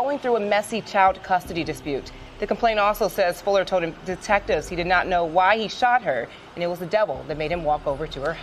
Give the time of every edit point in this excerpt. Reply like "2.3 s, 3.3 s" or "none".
none